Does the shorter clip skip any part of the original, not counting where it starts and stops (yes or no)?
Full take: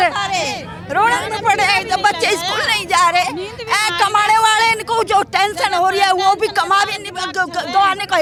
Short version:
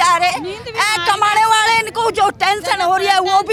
no